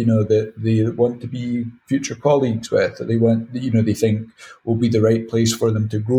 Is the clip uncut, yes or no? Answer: yes